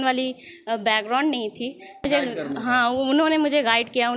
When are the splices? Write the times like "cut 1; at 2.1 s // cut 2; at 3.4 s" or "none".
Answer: cut 1; at 2.1 s